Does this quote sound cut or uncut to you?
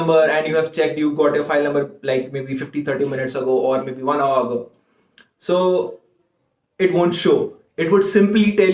uncut